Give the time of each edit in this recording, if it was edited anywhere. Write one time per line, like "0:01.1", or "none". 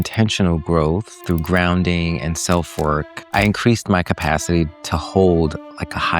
0:01.1
0:03.2